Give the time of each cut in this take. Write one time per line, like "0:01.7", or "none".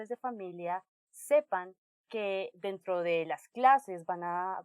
0:02.5